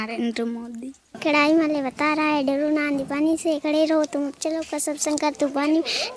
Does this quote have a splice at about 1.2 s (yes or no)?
yes